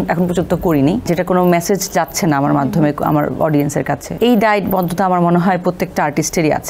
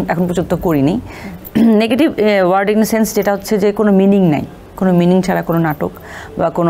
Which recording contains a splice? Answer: first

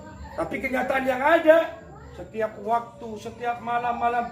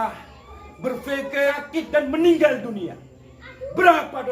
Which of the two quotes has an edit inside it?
second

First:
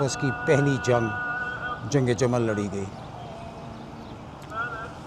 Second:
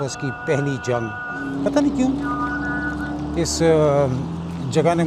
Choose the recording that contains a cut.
second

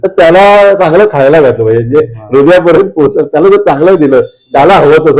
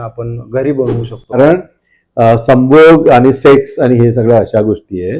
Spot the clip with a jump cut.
second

